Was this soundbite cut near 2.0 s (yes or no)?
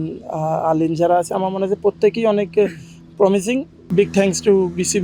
no